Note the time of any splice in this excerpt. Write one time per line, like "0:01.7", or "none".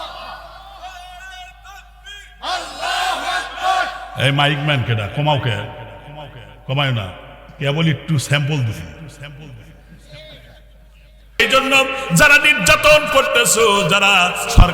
0:11.4